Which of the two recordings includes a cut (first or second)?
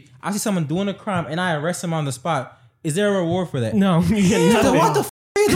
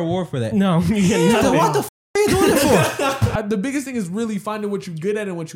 second